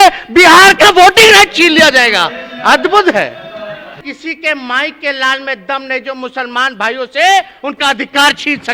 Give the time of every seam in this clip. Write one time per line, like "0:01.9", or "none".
0:04.0